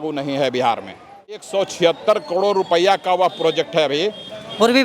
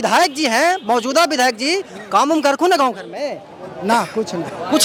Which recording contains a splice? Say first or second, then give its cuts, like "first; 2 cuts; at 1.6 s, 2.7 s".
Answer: first; 1 cut; at 1.4 s